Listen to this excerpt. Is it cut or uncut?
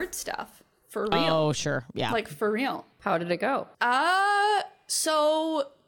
cut